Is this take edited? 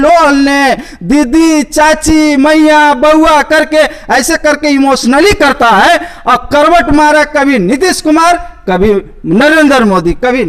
no; 0 cuts

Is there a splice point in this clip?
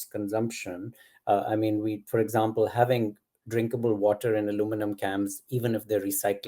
no; 0 cuts

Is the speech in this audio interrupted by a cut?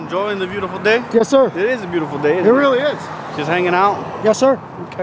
no; 0 cuts

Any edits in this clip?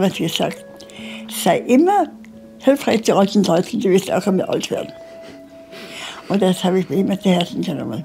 no; 0 cuts

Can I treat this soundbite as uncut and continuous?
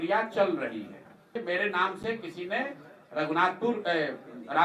no; 1 cut; at 1.4 s

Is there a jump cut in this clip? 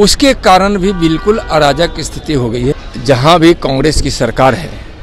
yes; 1 cut; at 2.8 s

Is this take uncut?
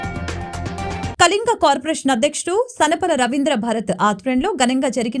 yes; 0 cuts

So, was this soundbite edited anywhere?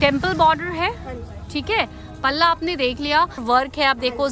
yes; 1 cut; at 3.4 s

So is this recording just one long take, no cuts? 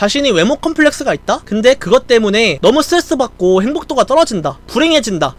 yes; 0 cuts

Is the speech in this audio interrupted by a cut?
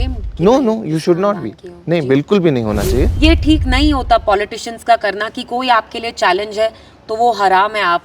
yes; 1 cut; at 3.1 s

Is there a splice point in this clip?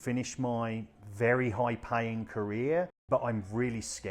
yes; 2 cuts; at 1.0 s, 3.0 s

